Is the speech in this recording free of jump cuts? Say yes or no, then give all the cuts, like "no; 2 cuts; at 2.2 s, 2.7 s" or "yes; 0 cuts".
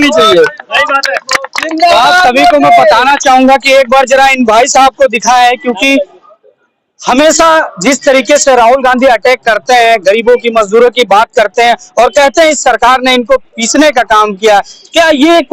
yes; 0 cuts